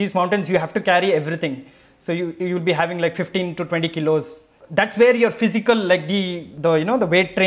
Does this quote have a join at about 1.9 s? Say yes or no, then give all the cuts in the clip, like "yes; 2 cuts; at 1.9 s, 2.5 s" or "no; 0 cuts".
no; 2 cuts; at 4.5 s, 6.4 s